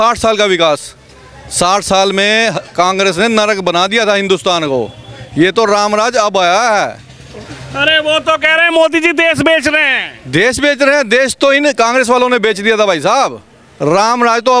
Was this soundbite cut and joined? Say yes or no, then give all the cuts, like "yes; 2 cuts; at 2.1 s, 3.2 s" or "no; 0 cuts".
no; 0 cuts